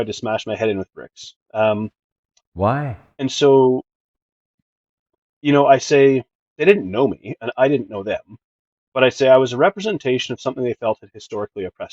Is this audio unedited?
yes; 0 cuts

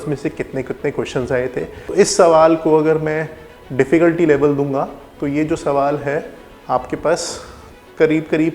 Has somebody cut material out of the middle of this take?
yes; 1 cut; at 1.9 s

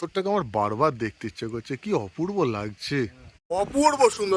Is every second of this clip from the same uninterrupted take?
no; 1 cut; at 3.3 s

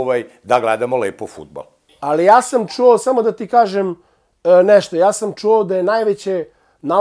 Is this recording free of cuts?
no; 1 cut; at 2.2 s

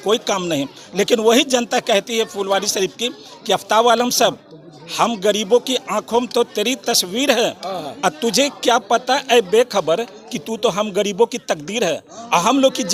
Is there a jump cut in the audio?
no; 0 cuts

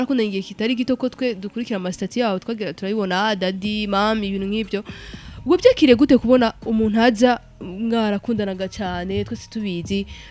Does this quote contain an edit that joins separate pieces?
no; 0 cuts

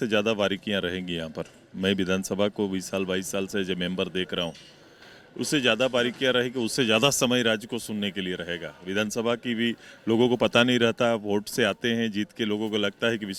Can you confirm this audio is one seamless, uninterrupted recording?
yes; 0 cuts

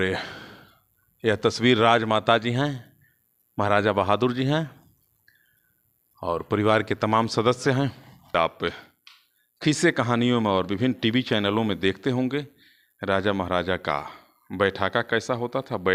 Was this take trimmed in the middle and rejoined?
yes; 1 cut; at 8.3 s

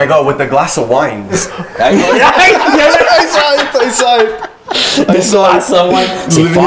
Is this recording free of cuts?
yes; 0 cuts

